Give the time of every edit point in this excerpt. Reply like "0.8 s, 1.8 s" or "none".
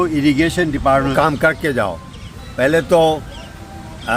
1.1 s